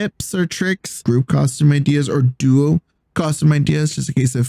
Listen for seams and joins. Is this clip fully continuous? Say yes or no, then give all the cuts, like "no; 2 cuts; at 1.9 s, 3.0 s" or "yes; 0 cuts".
no; 1 cut; at 1.0 s